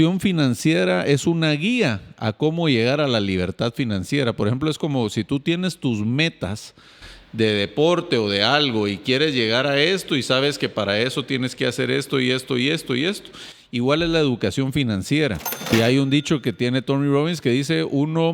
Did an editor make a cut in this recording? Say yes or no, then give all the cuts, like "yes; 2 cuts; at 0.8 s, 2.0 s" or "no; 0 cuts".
yes; 1 cut; at 15.7 s